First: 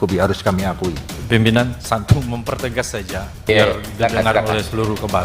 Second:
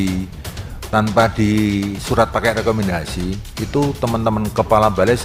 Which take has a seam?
first; 1 cut; at 1.1 s

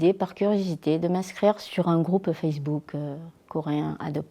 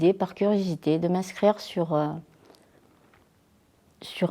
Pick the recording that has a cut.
first; 1 cut; at 1.6 s

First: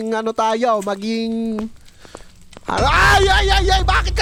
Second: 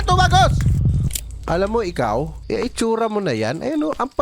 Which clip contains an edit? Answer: second; 2 cuts; at 1.1 s, 2.4 s

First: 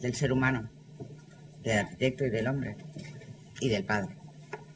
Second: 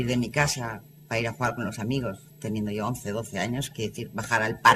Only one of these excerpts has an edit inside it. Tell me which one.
second; 1 cut; at 3.0 s

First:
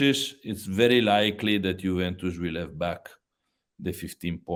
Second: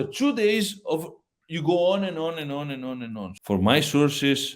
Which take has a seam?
second; 1 cut; at 3.3 s

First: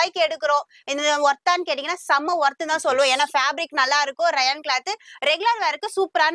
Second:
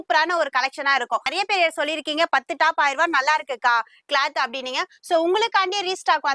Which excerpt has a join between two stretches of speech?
second; 1 cut; at 1.3 s

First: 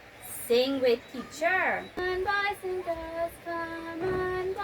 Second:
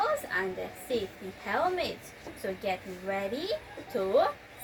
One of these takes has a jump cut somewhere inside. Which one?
first; 1 cut; at 2.0 s

